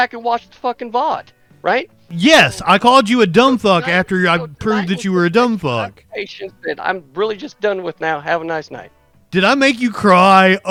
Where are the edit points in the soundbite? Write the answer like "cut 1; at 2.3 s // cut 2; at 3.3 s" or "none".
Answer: none